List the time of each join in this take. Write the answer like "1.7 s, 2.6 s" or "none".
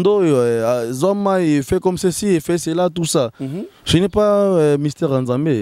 none